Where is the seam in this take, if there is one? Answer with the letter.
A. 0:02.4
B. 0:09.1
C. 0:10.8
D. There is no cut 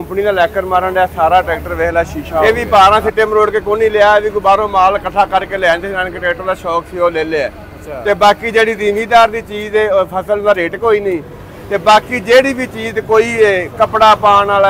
A